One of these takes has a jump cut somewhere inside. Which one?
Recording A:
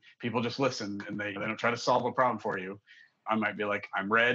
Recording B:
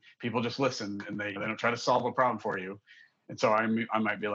A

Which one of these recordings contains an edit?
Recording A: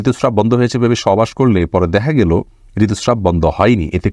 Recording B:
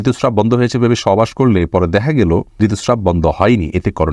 B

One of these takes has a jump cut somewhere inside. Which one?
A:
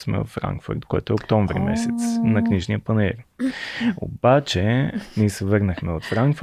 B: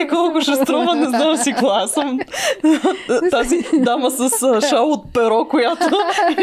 A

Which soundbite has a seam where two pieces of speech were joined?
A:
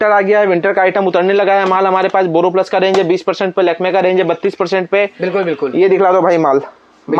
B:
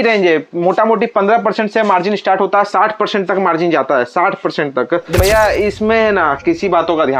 B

